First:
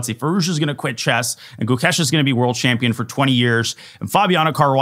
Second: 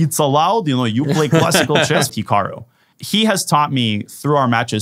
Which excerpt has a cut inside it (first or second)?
second